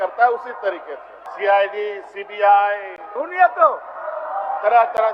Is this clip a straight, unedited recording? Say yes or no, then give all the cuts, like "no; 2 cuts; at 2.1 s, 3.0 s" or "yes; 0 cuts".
no; 1 cut; at 1.2 s